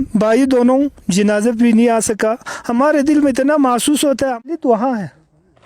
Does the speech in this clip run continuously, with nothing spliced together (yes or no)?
no